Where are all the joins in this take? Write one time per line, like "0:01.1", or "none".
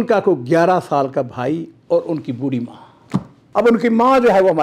0:03.4